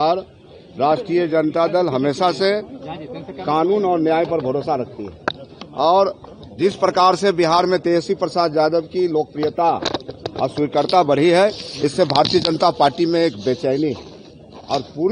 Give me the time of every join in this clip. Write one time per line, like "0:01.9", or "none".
none